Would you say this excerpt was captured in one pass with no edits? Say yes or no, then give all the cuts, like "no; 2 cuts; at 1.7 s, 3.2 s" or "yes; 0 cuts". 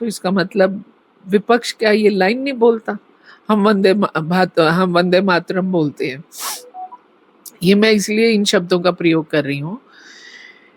yes; 0 cuts